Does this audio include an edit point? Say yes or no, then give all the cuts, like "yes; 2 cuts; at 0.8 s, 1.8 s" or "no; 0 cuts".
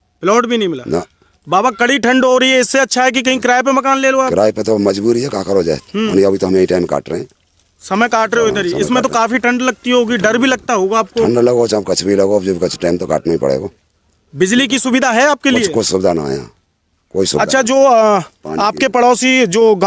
no; 0 cuts